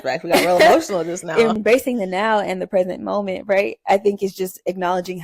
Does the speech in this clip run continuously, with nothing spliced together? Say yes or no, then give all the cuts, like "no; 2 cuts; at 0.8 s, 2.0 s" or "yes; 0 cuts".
no; 1 cut; at 1.6 s